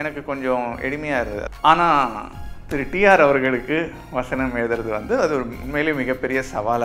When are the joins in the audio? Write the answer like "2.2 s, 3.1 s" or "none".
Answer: 1.5 s